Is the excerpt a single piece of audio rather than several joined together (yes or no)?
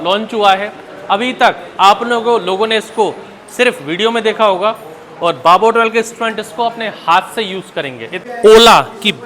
no